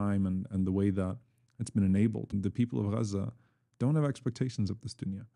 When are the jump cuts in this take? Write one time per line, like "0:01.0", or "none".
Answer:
0:02.3